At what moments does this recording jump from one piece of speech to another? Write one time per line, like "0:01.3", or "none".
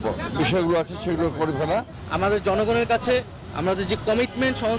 0:02.0